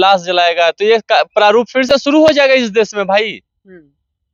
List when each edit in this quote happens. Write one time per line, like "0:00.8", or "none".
none